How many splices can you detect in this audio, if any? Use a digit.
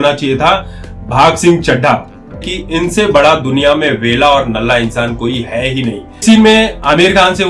2